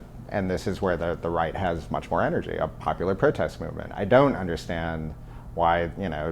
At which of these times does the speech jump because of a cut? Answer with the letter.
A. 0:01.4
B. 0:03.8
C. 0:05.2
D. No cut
B